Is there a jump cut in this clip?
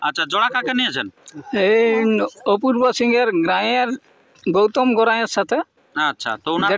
no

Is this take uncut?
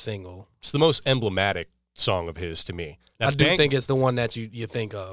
no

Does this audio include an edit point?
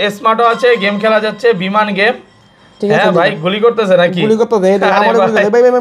no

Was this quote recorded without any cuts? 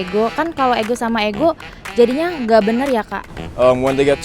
no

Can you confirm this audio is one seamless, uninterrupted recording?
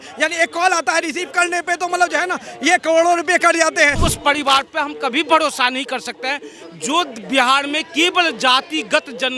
no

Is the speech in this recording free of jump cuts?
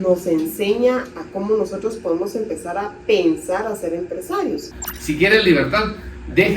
no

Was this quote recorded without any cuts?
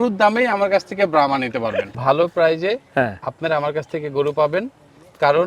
no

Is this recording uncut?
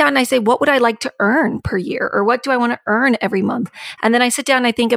yes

